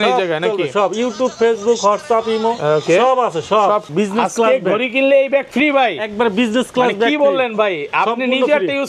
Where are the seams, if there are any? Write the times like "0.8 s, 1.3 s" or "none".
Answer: 3.8 s